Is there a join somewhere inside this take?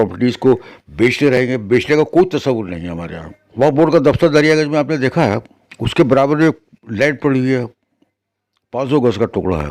no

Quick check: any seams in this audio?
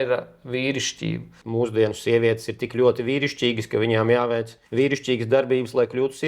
yes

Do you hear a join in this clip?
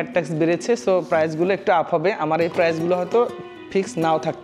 no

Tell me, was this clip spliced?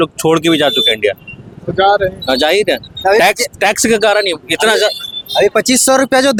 no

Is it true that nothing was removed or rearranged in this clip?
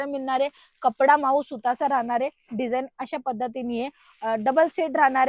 yes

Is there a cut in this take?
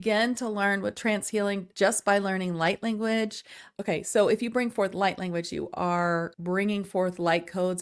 no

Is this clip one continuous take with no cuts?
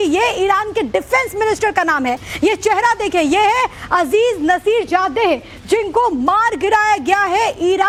yes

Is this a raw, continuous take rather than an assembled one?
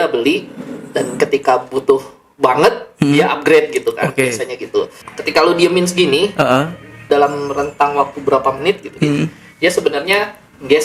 no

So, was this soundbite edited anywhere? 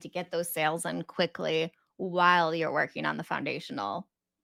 no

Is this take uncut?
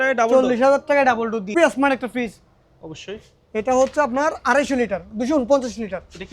no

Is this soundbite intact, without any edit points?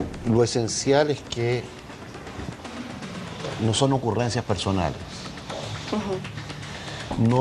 yes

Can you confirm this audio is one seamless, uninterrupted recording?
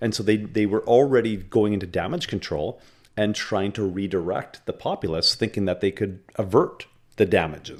yes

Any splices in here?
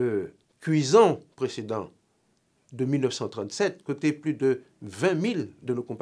no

